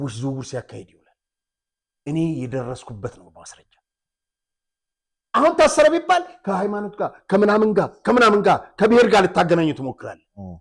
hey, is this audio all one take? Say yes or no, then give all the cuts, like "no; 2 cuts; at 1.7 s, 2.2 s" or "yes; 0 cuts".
yes; 0 cuts